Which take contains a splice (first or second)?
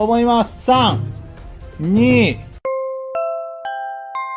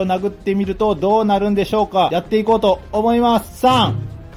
first